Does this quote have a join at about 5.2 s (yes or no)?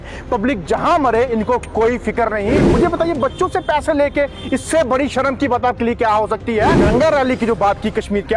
no